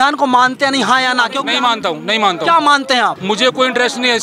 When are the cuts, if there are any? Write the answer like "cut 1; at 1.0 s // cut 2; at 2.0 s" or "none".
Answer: cut 1; at 1.4 s // cut 2; at 3.2 s